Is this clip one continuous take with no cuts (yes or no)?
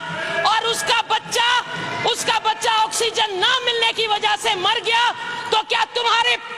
yes